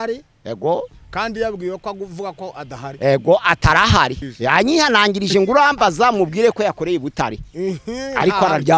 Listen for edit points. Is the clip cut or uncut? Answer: cut